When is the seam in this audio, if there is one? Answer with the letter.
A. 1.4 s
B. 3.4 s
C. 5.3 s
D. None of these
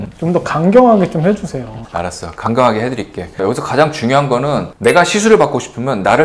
B